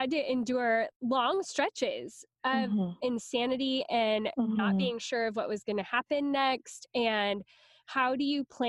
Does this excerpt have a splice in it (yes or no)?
yes